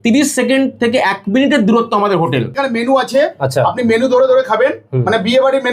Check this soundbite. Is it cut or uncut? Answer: cut